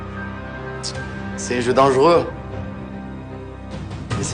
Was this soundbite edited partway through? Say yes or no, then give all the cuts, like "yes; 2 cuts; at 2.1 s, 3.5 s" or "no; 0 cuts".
no; 0 cuts